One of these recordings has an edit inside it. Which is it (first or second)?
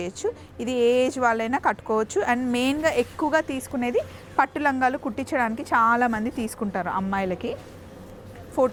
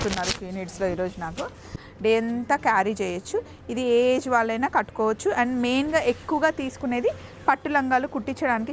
second